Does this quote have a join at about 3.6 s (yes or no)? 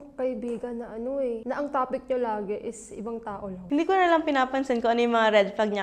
yes